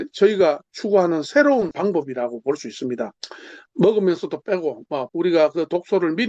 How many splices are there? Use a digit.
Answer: 2